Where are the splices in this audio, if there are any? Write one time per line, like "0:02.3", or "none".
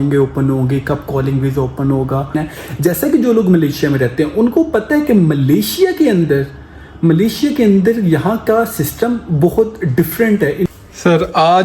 0:02.4
0:10.7